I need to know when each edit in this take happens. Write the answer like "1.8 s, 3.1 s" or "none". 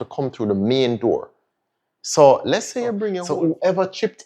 3.2 s